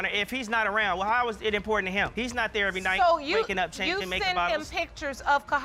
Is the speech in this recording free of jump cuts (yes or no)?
yes